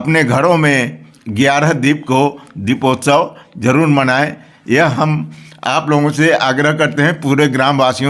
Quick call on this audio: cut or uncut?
uncut